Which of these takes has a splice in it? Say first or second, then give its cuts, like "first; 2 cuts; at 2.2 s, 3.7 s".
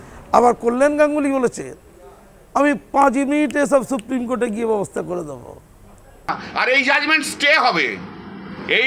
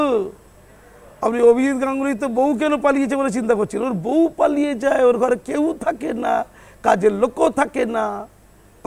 first; 1 cut; at 6.2 s